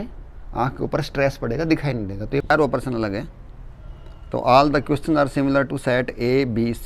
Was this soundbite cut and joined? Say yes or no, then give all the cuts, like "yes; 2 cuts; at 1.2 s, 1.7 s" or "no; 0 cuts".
yes; 1 cut; at 2.5 s